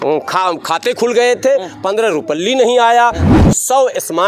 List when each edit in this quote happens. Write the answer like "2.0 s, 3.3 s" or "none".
3.2 s

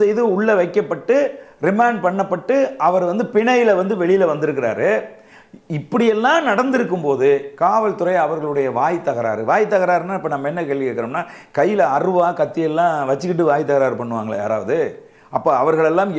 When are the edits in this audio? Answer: none

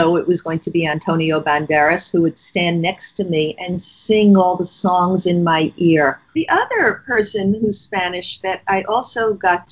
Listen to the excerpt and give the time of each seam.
6.2 s

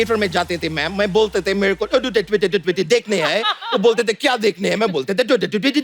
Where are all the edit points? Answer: none

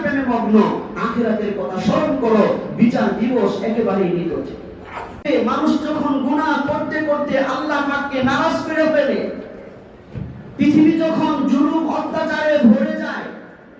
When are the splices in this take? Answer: 5.3 s

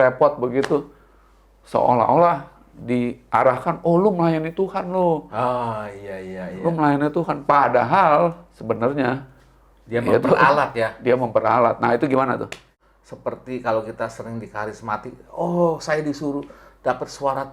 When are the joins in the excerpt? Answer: 12.7 s

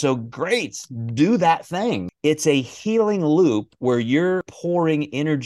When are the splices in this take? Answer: 2.1 s, 4.5 s

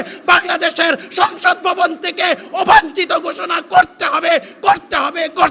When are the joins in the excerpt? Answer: none

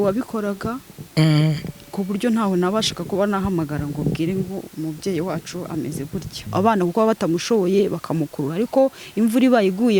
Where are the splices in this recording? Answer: 6.4 s

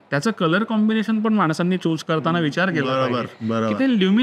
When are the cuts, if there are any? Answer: none

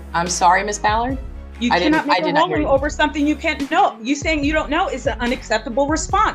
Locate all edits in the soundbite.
none

